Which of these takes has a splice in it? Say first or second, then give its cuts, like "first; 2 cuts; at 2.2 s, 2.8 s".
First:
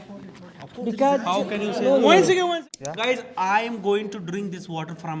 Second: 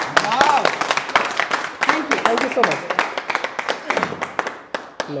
first; 1 cut; at 2.5 s